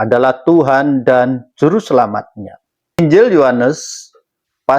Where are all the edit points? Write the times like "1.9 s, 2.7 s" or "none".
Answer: none